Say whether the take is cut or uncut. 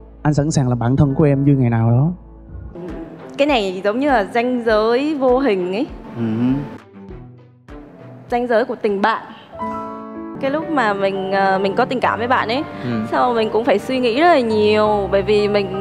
cut